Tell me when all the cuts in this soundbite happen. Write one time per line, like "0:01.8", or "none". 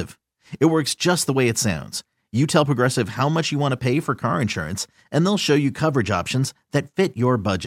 none